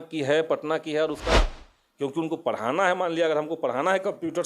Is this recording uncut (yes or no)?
no